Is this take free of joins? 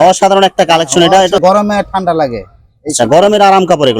no; 1 cut; at 1.4 s

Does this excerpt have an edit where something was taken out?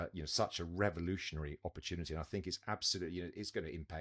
no; 0 cuts

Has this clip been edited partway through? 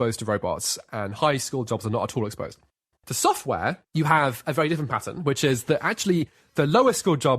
yes; 2 cuts; at 2.8 s, 3.8 s

